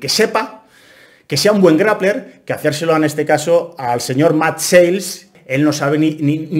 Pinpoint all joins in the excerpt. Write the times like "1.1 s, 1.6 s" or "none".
5.3 s